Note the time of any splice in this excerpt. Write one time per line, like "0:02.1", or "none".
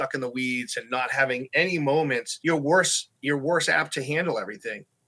0:02.3

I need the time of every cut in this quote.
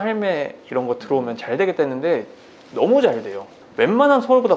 none

